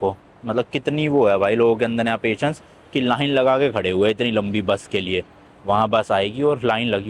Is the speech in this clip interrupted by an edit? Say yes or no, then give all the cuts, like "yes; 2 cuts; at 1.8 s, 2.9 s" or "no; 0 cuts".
no; 0 cuts